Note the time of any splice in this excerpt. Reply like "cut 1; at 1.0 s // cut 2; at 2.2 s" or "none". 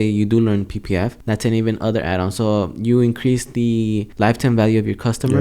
cut 1; at 1.2 s // cut 2; at 4.1 s